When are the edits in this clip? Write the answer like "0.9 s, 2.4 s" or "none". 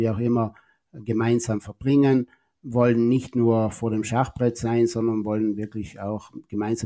none